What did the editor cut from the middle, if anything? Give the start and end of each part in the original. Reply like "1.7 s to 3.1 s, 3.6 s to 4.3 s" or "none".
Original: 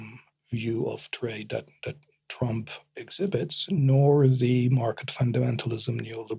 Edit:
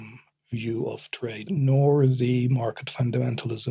1.4 s to 3.6 s

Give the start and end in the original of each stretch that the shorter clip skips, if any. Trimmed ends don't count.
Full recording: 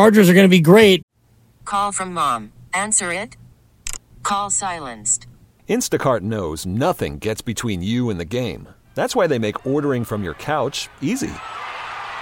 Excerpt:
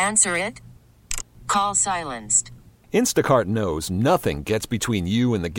none

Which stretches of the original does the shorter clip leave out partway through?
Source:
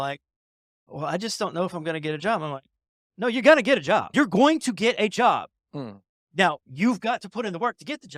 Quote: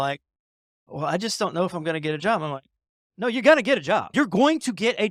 none

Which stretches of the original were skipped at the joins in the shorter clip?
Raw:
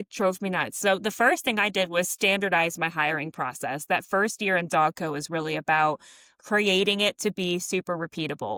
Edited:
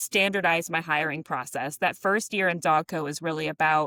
none

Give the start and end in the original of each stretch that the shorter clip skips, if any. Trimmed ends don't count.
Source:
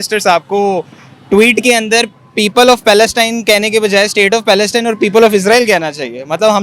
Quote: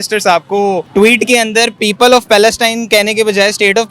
0.9 s to 1.2 s, 2.1 s to 2.3 s

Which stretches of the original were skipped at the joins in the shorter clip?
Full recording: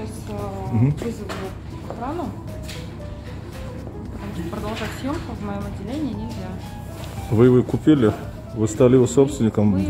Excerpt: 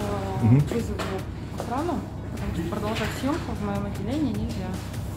2.6 s to 4.1 s

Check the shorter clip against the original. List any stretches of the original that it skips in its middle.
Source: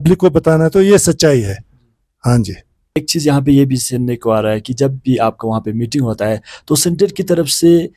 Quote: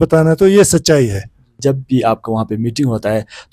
1.9 s to 4.7 s

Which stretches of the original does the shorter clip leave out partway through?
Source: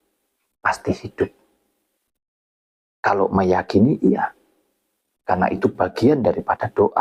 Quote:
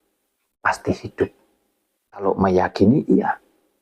2.2 s to 3.2 s

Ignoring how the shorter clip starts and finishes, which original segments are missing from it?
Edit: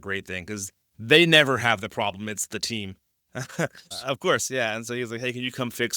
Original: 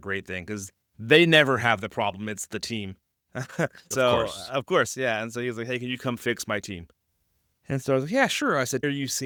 3.9 s to 4.3 s

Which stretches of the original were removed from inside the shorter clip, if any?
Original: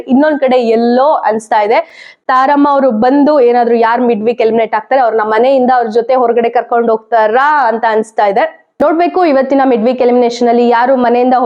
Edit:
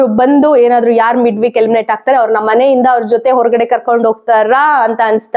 none

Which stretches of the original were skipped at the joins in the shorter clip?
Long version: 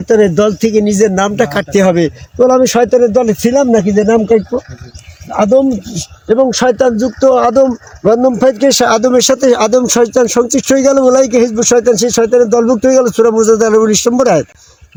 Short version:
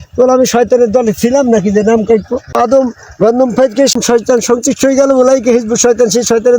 4.8 s to 7.4 s, 8.8 s to 9.8 s

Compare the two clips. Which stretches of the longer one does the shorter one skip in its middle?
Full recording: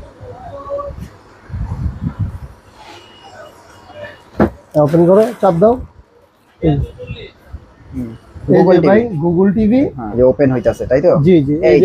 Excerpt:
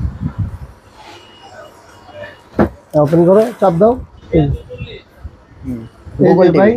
5.9 s to 6.4 s

